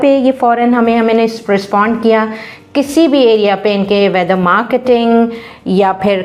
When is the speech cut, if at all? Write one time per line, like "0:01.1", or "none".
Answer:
none

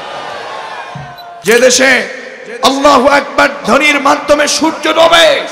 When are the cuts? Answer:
0:01.4

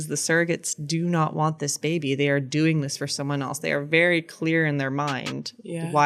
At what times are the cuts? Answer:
none

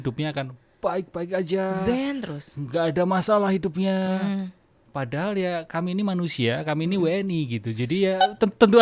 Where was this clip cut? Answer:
none

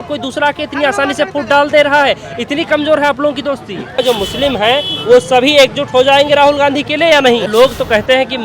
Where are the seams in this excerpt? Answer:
0:04.0
0:07.5

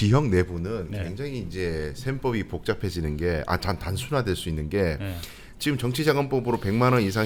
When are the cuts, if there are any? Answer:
none

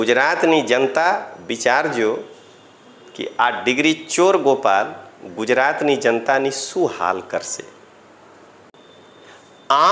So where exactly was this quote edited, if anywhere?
0:08.7

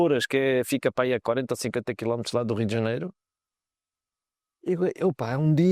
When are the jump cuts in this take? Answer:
none

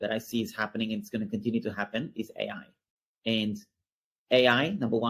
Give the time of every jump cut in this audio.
none

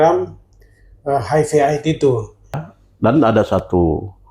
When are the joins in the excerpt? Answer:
0:02.6

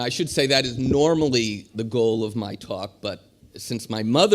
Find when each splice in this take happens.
0:02.4

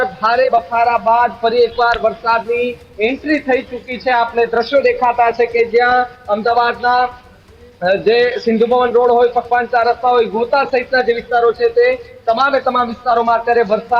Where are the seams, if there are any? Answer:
none

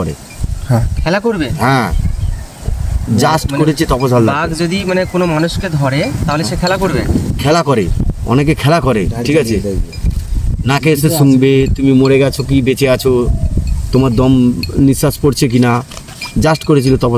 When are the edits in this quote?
none

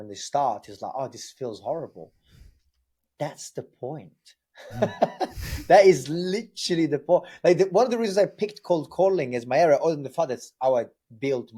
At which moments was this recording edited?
none

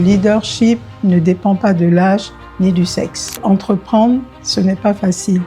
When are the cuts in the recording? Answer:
0:03.4

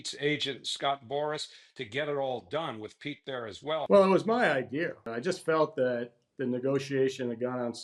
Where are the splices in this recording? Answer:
0:03.9
0:05.1

